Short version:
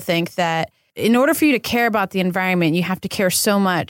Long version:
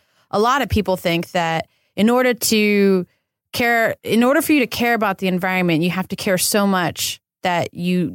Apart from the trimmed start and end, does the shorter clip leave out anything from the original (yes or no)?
yes